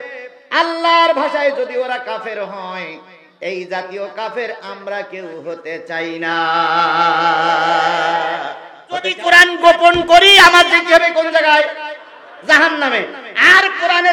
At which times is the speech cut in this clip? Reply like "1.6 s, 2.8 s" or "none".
9.1 s